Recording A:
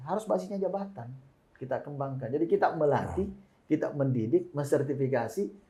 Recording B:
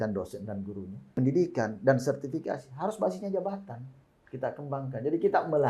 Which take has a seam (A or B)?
B